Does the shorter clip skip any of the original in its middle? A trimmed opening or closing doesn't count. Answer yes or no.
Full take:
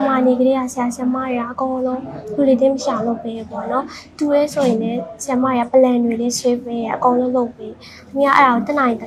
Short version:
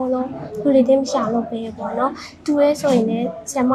no